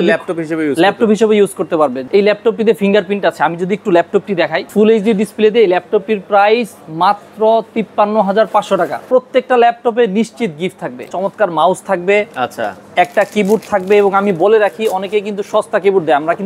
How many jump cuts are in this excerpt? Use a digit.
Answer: 4